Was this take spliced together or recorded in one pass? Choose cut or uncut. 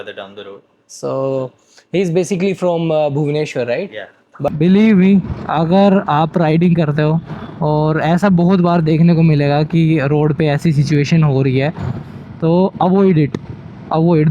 cut